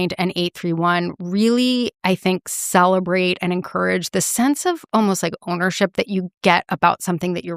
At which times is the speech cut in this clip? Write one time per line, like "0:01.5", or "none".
none